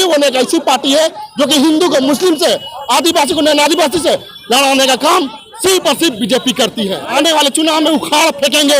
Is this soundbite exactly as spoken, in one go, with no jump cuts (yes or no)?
no